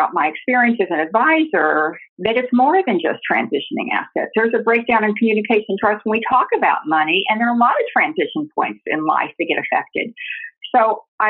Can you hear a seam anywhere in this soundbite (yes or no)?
yes